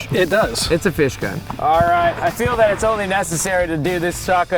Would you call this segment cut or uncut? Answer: cut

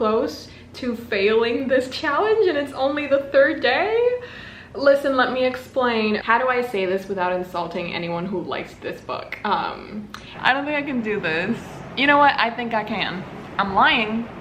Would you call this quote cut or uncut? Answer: cut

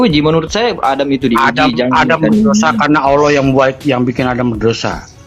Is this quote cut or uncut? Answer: uncut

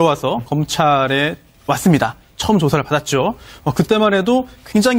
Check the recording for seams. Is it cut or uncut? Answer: cut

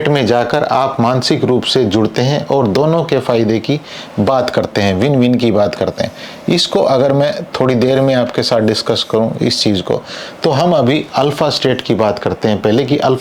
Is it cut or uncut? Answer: uncut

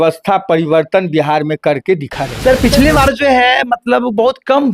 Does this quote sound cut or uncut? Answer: cut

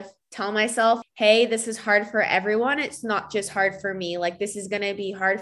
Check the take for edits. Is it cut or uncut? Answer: cut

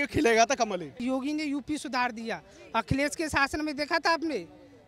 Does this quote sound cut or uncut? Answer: cut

